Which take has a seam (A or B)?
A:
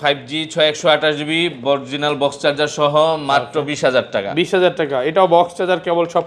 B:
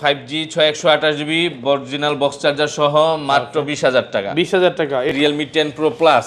B